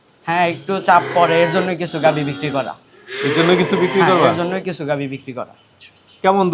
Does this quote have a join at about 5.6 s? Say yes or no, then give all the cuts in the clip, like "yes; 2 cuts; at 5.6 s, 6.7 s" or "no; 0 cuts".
yes; 1 cut; at 5.6 s